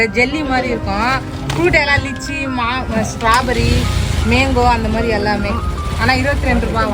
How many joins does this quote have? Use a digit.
0